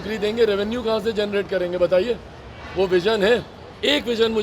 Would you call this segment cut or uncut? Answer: uncut